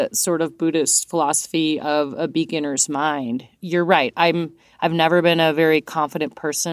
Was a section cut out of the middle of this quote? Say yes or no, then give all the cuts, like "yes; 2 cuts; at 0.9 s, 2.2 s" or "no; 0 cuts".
no; 0 cuts